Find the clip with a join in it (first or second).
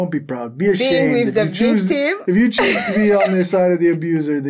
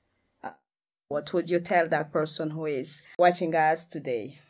second